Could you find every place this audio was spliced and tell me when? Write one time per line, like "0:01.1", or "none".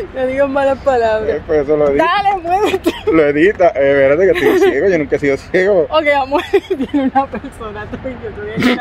none